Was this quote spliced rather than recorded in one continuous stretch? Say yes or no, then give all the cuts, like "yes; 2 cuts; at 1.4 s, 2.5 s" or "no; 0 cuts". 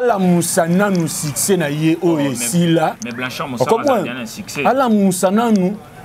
no; 0 cuts